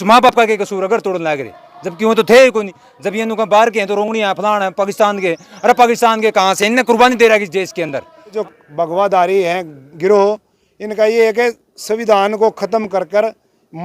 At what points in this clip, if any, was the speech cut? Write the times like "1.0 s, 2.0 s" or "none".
8.4 s